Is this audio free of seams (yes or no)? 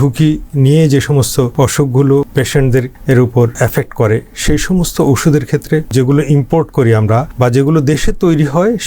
no